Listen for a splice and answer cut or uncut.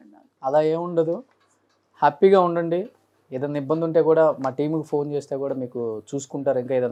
uncut